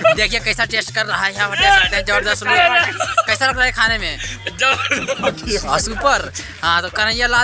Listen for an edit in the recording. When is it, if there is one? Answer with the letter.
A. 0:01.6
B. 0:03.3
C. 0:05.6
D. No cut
D